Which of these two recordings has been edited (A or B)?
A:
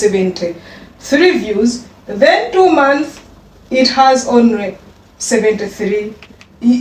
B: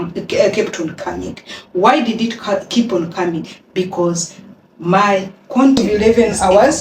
B